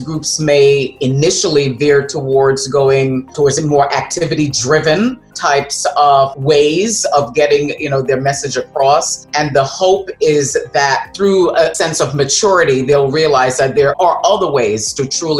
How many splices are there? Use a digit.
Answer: 3